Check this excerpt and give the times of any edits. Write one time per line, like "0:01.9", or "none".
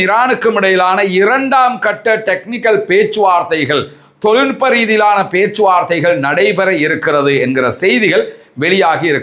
none